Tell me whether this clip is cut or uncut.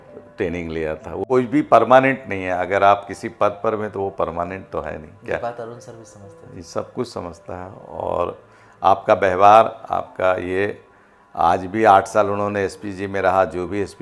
cut